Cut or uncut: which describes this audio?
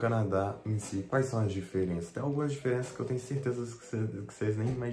cut